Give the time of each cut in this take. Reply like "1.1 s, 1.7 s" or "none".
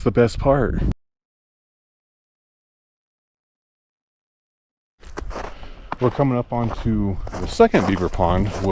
none